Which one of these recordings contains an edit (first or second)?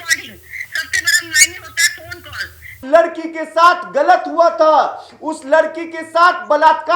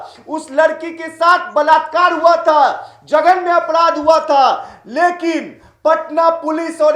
first